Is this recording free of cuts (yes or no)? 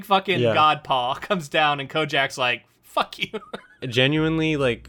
no